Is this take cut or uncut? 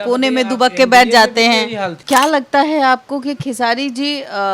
cut